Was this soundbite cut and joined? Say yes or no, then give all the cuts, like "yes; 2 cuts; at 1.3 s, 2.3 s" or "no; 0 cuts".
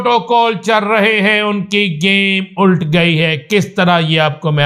no; 0 cuts